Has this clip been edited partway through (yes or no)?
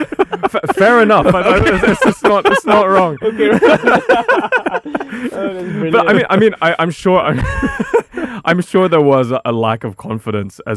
no